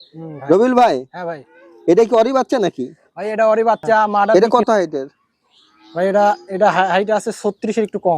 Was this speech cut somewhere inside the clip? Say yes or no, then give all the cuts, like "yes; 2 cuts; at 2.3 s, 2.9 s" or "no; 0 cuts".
yes; 1 cut; at 4.3 s